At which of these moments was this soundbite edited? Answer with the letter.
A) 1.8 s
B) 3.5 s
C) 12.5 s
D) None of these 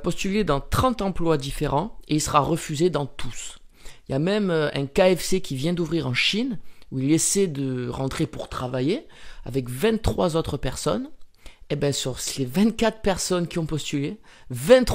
D